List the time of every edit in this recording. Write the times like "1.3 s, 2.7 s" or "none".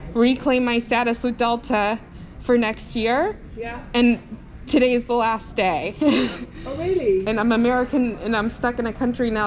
7.3 s

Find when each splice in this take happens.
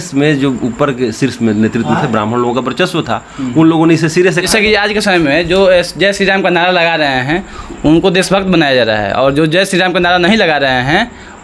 4.5 s

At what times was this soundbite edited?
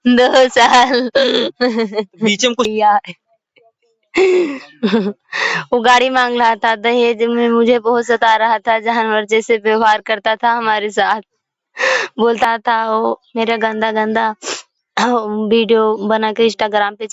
2.7 s, 12.4 s

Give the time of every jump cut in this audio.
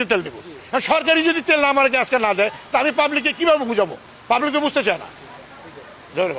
none

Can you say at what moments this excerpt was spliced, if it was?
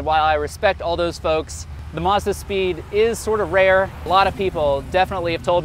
1.8 s, 4.0 s

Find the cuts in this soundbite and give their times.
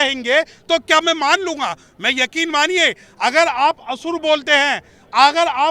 none

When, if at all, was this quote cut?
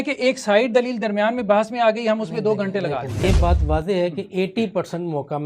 3.2 s

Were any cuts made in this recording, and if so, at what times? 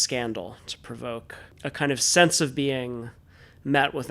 1.5 s

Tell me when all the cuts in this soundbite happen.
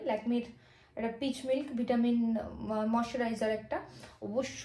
none

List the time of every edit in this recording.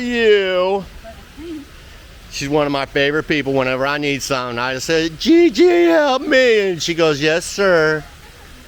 none

